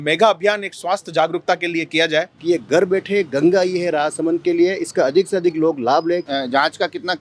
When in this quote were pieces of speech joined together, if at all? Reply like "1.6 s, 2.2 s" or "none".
2.3 s, 6.2 s

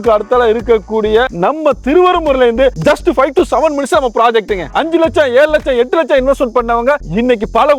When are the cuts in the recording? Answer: 4.7 s

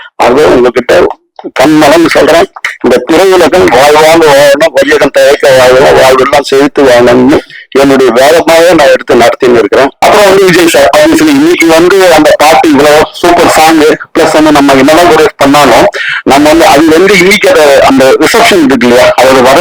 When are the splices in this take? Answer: 9.9 s

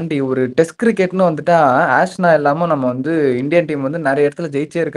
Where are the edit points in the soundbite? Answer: none

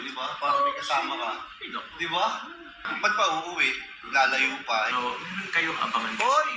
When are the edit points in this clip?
2.9 s, 4.9 s

